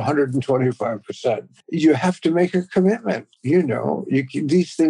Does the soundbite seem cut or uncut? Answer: cut